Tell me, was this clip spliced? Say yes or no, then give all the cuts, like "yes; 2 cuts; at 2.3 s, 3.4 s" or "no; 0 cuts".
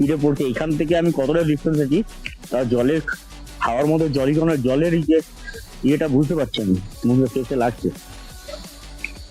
no; 0 cuts